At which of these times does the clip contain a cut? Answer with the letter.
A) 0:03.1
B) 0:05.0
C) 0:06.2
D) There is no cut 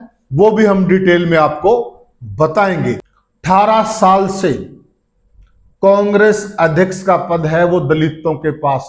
A